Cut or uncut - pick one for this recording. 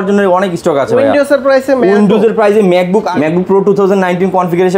cut